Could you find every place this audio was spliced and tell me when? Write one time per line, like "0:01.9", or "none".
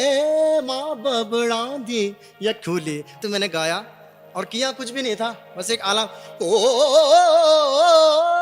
0:03.2